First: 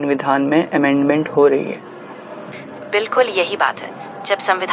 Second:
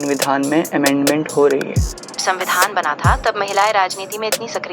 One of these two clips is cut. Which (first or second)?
second